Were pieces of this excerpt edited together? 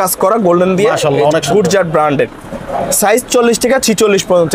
no; 0 cuts

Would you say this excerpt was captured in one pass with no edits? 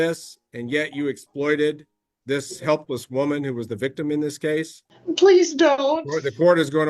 no; 1 cut; at 4.9 s

